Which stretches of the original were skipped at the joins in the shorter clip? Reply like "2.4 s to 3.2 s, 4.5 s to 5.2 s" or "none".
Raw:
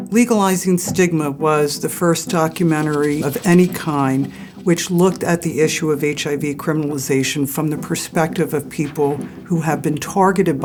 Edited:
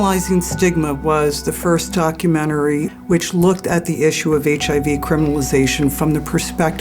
3.3 s to 4.5 s